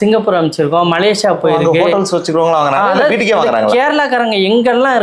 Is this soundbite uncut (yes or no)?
yes